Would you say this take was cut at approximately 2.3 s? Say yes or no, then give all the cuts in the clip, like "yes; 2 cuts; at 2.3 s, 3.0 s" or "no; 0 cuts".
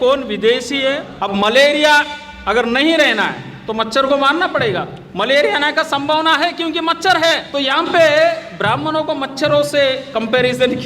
no; 3 cuts; at 1.1 s, 5.0 s, 7.5 s